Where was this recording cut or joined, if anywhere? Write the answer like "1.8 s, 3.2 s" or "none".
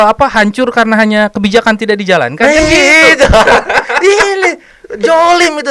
none